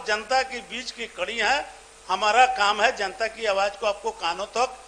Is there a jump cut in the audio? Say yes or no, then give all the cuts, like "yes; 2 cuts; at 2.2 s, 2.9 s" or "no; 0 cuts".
no; 0 cuts